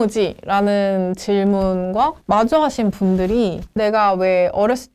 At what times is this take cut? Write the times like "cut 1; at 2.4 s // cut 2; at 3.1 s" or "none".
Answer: cut 1; at 2.2 s // cut 2; at 3.6 s